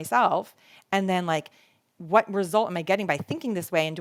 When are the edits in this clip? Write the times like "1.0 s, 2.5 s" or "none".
none